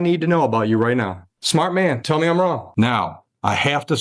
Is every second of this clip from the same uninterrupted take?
no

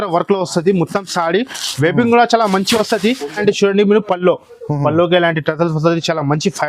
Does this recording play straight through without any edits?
yes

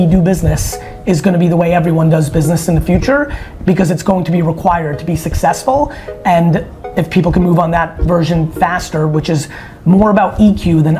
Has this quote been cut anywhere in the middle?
no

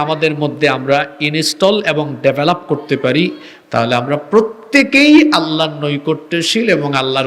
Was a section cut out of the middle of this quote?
no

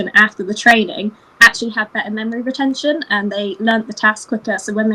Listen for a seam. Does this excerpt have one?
no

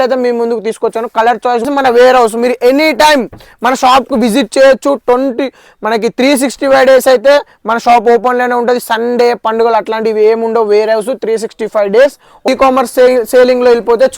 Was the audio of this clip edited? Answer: yes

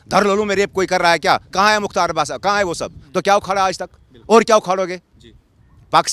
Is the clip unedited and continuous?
no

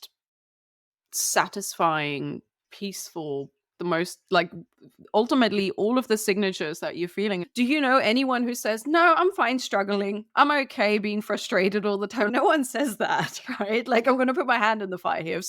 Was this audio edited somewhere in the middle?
yes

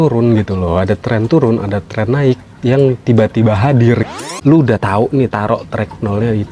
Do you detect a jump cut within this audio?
yes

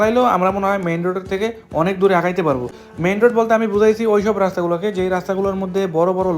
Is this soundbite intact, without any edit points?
yes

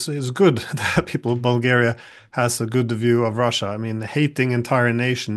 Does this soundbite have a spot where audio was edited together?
no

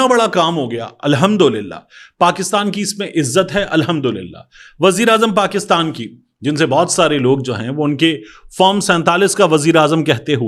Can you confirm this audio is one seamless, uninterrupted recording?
yes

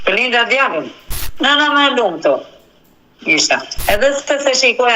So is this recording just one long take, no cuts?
no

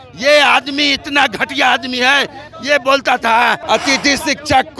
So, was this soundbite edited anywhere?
yes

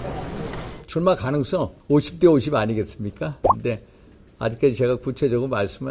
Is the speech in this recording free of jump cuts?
no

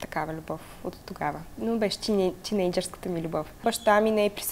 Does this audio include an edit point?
yes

